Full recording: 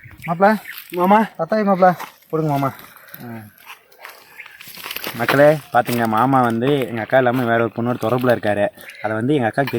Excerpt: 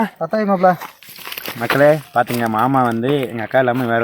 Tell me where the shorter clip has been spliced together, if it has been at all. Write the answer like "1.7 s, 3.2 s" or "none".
1.0 s